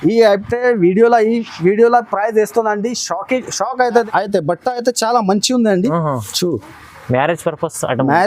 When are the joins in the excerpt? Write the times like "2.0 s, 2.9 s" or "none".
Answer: 4.0 s